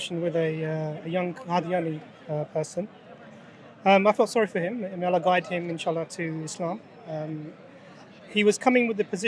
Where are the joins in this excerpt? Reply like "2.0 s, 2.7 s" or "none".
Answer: none